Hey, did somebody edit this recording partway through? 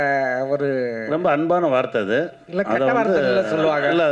no; 0 cuts

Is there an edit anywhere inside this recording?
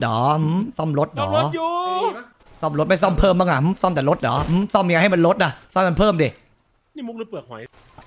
no; 0 cuts

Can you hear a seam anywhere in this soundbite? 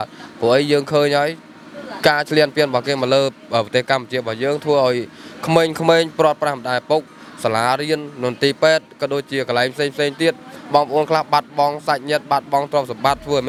no; 0 cuts

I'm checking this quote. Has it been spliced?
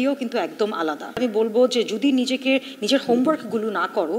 yes; 1 cut; at 1.2 s

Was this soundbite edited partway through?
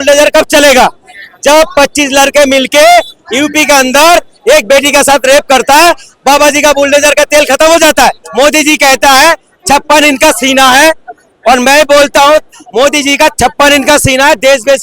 yes; 1 cut; at 8.2 s

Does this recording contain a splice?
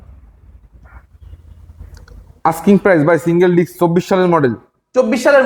no; 0 cuts

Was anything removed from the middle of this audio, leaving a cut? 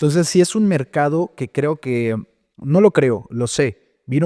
no; 0 cuts

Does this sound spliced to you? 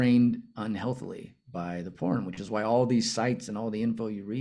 no; 0 cuts

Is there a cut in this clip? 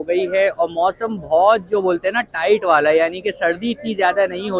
no; 0 cuts

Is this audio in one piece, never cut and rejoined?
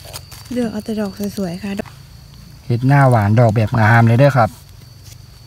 no; 1 cut; at 1.8 s

